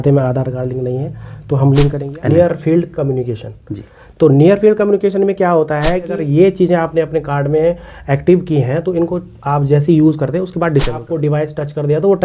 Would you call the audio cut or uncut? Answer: cut